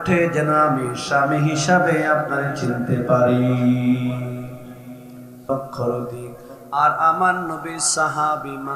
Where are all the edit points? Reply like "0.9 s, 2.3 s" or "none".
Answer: 5.4 s